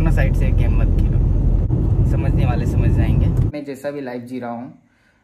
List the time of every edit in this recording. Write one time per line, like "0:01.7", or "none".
0:01.7
0:03.5